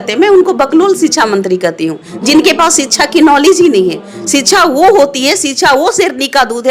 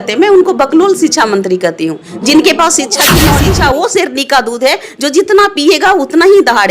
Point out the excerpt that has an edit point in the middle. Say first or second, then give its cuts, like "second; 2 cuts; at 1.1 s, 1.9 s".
second; 1 cut; at 3.2 s